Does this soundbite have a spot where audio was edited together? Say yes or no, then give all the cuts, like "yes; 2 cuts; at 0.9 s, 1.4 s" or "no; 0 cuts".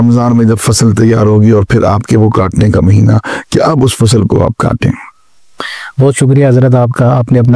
no; 0 cuts